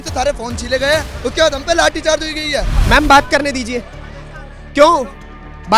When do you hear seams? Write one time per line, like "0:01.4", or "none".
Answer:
0:02.7